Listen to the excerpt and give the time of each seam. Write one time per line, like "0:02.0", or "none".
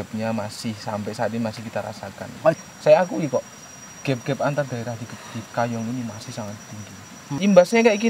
0:02.6
0:07.2